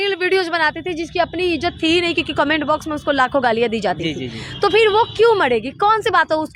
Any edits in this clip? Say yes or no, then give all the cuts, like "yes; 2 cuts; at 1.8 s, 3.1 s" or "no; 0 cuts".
no; 0 cuts